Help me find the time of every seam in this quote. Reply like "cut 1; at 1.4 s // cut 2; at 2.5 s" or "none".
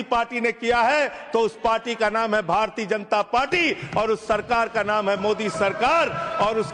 none